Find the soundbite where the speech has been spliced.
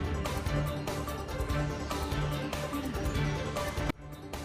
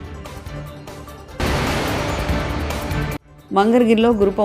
second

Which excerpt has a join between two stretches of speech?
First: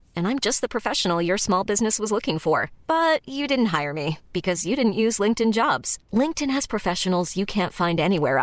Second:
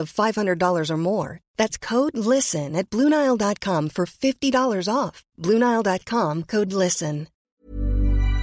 second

